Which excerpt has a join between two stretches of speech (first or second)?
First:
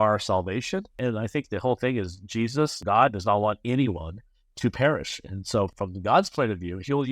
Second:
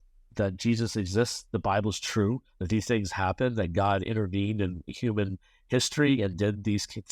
first